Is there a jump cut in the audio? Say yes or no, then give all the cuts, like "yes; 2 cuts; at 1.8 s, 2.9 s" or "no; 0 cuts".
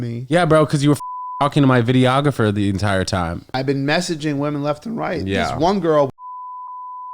yes; 1 cut; at 3.6 s